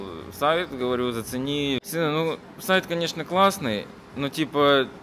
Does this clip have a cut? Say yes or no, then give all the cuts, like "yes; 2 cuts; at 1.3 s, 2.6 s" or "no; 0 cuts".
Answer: yes; 1 cut; at 1.8 s